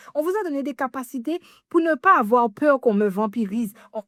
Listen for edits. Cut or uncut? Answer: uncut